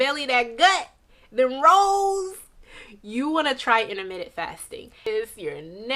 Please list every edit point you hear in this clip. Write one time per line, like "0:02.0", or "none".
0:05.0